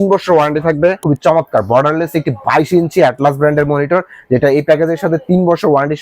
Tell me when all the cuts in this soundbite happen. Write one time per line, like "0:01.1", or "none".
0:01.0